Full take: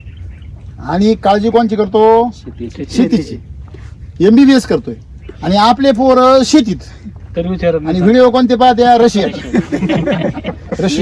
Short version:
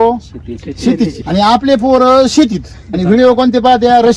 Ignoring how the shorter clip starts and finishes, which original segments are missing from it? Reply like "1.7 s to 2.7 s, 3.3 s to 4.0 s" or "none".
3.3 s to 5.4 s, 7.1 s to 7.9 s